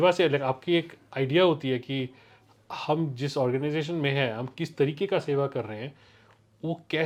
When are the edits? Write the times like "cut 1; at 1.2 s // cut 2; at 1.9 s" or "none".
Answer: none

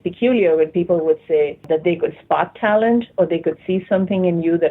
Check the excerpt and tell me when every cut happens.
cut 1; at 1.6 s

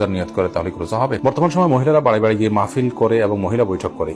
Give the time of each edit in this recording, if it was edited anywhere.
cut 1; at 0.9 s

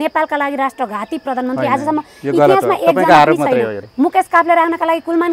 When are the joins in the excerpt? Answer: cut 1; at 3.8 s

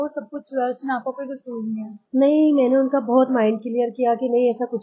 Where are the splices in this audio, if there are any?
cut 1; at 2.0 s

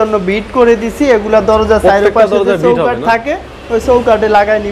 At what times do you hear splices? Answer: none

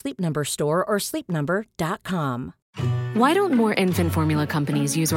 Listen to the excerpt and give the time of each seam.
cut 1; at 2.6 s

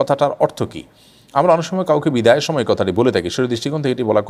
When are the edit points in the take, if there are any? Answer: none

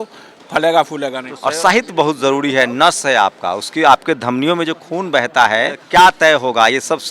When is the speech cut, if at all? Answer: cut 1; at 1.2 s // cut 2; at 5.8 s

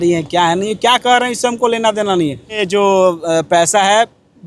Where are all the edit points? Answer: cut 1; at 2.6 s

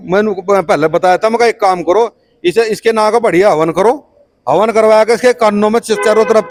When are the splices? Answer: none

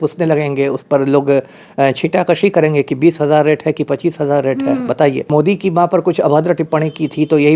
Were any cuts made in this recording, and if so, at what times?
cut 1; at 5.3 s

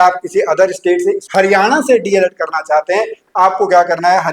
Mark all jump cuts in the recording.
cut 1; at 1.2 s // cut 2; at 3.2 s

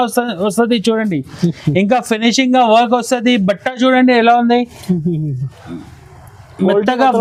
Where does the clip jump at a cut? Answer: none

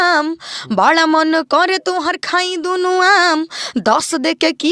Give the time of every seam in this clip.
none

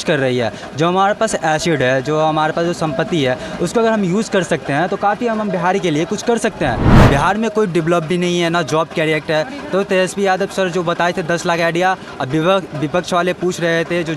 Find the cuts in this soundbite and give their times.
cut 1; at 7.0 s

